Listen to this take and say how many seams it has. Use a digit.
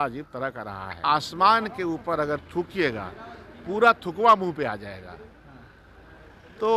1